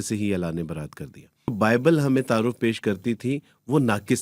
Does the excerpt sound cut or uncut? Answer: cut